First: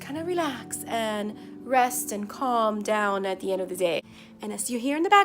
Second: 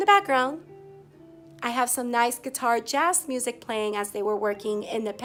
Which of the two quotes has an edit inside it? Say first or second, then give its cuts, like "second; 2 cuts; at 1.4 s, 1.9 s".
first; 1 cut; at 4.1 s